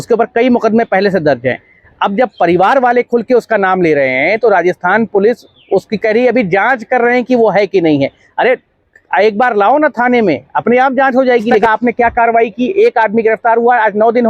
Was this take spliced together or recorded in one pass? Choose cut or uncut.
cut